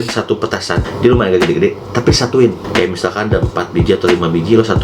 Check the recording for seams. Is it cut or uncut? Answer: cut